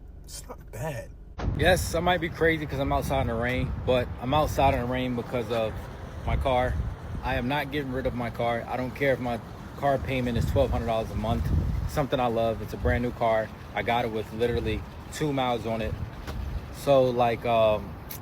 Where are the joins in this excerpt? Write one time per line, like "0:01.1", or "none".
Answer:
0:01.2